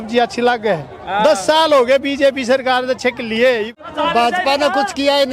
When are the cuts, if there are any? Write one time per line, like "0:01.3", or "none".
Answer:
0:03.7

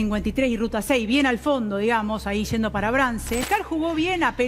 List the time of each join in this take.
0:03.5

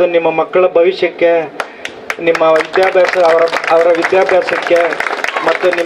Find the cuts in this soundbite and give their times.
none

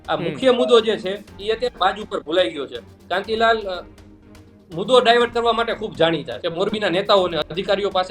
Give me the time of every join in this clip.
0:06.4

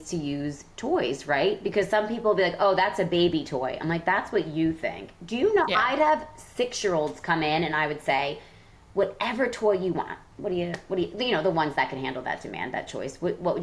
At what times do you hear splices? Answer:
none

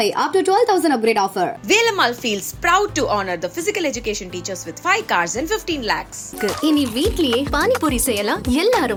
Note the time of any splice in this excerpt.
none

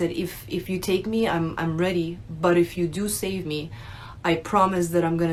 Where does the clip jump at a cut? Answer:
none

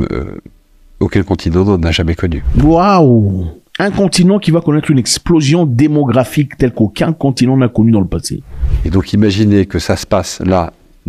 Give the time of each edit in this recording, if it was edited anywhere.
none

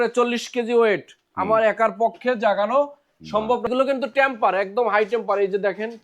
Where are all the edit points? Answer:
0:03.7

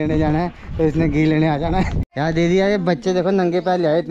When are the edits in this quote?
0:02.0

